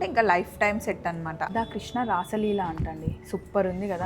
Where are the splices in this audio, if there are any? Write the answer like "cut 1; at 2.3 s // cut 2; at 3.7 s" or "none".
cut 1; at 1.5 s